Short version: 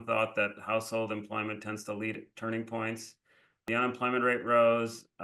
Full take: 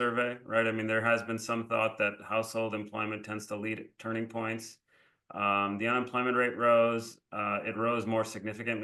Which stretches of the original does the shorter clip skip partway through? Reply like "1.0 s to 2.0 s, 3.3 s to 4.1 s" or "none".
5.3 s to 5.8 s

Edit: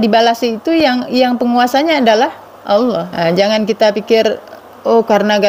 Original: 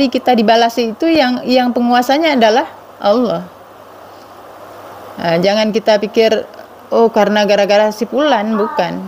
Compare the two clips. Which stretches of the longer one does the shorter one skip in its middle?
3.4 s to 5.2 s

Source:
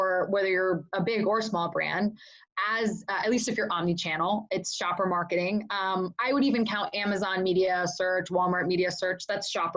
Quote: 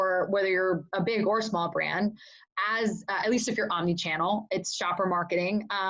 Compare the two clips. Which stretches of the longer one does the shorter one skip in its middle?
none

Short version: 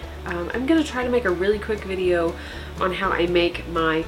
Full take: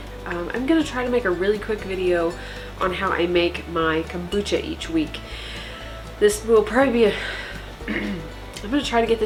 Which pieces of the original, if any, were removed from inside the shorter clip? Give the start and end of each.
none

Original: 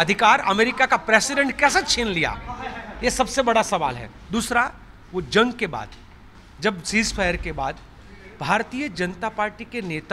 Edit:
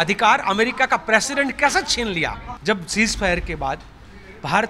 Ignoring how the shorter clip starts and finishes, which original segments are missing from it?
2.5 s to 6.4 s

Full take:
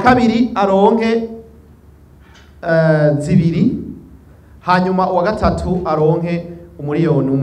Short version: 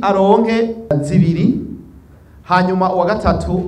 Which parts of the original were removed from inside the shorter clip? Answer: 1.4 s to 3.1 s

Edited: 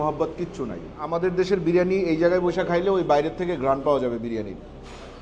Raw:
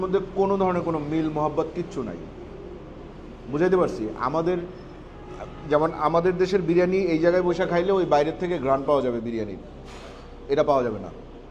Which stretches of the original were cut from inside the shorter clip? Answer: 2.5 s to 6.1 s

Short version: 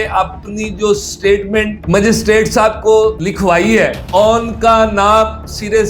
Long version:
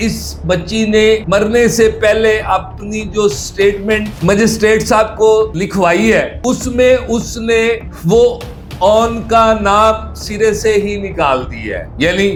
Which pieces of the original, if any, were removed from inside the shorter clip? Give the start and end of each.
6.3 s to 8.7 s

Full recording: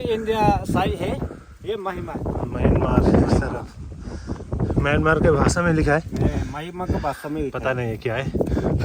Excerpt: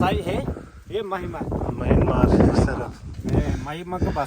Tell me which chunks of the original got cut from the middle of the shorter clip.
3.9 s to 6.1 s

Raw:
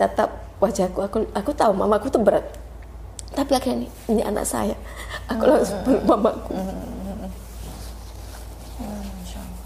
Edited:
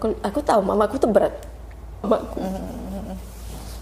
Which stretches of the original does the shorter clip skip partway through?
3.2 s to 6.2 s

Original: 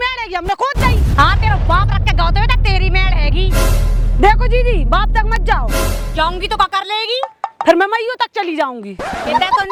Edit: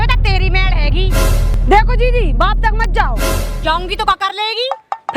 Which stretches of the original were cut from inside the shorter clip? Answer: 3.9 s to 4.0 s

